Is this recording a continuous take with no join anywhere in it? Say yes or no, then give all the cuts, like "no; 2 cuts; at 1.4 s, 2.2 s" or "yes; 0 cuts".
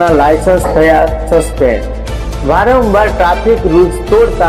yes; 0 cuts